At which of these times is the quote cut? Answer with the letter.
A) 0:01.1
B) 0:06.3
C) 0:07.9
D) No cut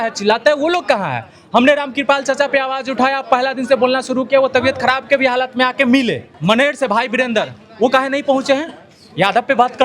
B